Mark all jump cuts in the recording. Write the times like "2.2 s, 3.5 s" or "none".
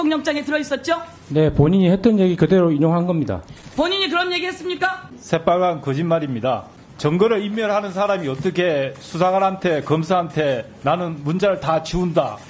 5.1 s, 6.8 s